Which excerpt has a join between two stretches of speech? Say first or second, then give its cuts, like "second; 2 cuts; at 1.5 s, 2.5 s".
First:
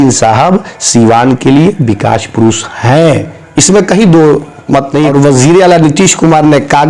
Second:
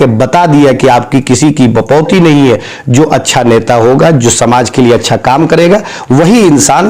first; 1 cut; at 5.1 s